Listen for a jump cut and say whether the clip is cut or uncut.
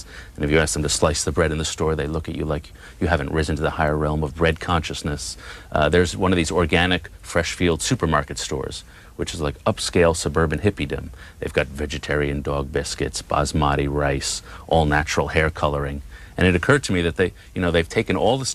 uncut